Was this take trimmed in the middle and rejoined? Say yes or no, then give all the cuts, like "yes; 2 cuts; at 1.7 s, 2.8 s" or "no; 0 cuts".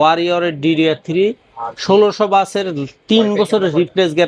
no; 0 cuts